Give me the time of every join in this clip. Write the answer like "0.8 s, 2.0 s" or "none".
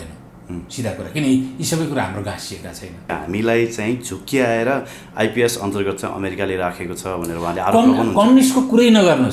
3.1 s